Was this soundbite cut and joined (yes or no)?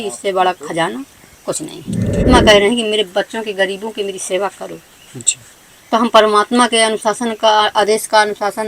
yes